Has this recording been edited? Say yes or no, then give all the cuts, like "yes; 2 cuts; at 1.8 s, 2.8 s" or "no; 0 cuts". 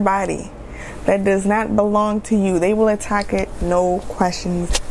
no; 0 cuts